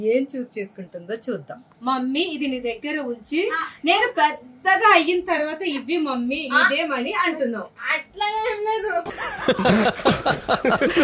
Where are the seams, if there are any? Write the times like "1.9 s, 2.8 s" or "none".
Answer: 1.7 s